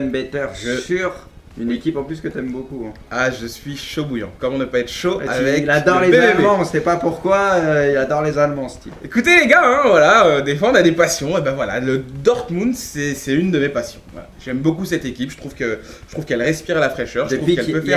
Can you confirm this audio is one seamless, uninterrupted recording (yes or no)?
no